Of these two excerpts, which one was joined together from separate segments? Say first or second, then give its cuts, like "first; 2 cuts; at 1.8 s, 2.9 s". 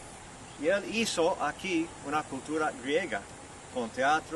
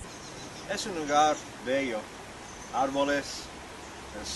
first; 1 cut; at 2.0 s